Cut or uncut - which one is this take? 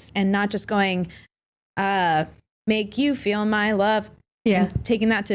uncut